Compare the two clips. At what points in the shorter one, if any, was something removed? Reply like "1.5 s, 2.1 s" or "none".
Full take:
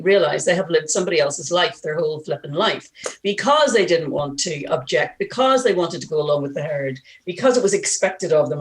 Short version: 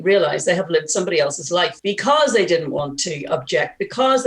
1.8 s